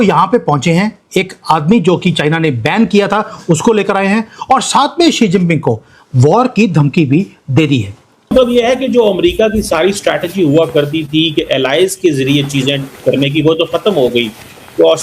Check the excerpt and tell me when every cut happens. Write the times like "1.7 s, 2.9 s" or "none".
8.3 s